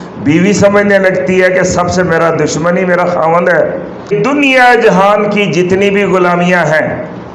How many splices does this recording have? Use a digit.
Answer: 1